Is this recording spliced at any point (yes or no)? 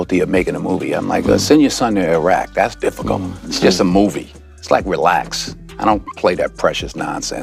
no